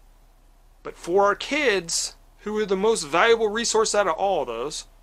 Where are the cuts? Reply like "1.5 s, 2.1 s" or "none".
none